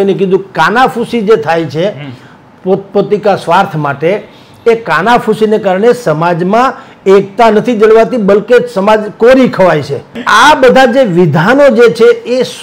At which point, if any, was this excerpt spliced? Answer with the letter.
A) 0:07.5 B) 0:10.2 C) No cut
B